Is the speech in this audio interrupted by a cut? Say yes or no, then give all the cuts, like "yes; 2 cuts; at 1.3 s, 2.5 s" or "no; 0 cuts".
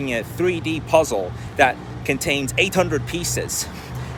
no; 0 cuts